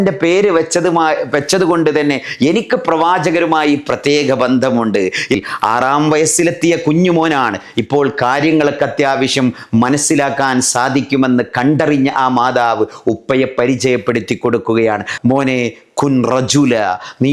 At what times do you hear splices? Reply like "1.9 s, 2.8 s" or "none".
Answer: 5.4 s, 15.1 s